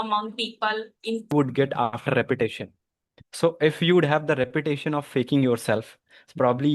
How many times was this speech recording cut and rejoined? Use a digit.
1